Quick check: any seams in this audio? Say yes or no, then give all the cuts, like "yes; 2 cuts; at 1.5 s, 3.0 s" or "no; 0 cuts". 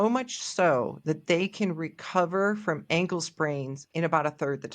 yes; 1 cut; at 3.8 s